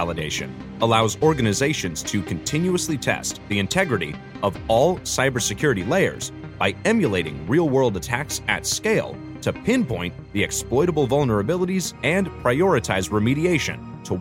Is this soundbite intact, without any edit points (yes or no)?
yes